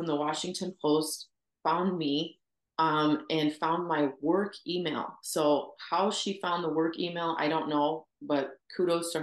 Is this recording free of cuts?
yes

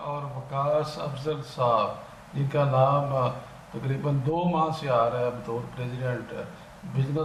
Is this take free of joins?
yes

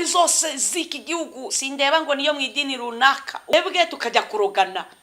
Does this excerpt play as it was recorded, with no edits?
no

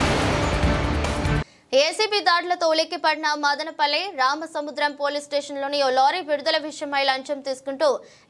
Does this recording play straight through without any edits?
yes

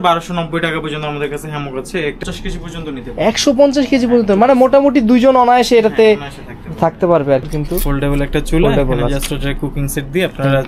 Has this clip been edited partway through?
yes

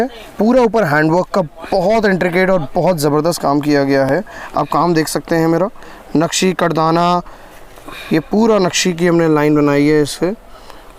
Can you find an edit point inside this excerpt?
no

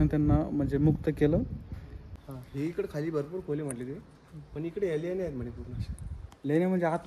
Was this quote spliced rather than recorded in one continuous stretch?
yes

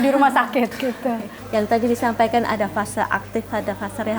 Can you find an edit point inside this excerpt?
yes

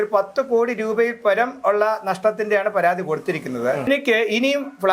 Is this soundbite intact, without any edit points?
no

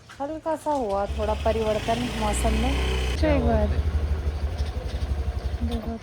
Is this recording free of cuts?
no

